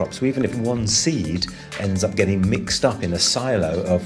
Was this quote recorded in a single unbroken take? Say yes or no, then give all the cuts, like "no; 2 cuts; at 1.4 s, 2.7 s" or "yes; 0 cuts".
no; 1 cut; at 1.6 s